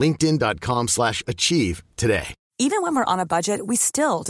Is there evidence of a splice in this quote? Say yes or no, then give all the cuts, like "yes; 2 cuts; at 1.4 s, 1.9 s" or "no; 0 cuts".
yes; 1 cut; at 2.4 s